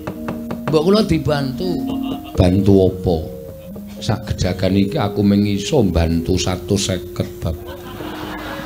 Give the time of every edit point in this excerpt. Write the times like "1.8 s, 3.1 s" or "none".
2.3 s, 3.7 s